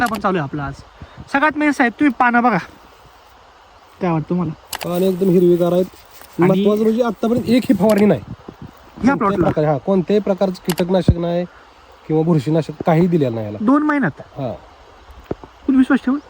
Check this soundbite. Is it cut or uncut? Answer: uncut